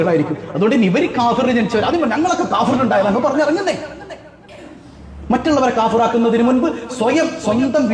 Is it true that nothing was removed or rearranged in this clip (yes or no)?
yes